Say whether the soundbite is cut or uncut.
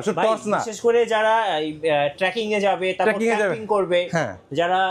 uncut